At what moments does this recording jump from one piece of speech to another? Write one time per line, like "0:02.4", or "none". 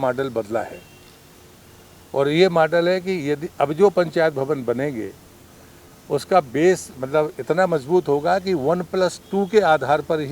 none